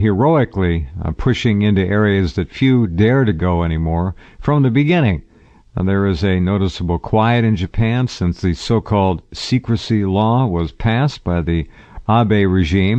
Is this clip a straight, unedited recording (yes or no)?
yes